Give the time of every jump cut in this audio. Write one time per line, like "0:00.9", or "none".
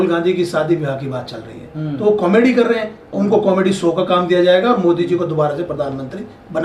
none